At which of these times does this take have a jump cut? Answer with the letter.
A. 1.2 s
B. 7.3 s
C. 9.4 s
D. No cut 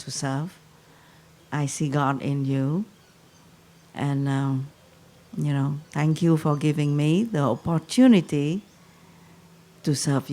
C